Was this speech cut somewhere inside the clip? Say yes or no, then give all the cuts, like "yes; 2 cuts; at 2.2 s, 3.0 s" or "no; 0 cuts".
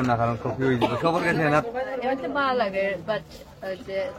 yes; 1 cut; at 1.6 s